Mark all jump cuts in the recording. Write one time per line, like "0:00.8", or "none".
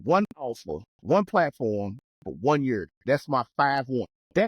0:00.9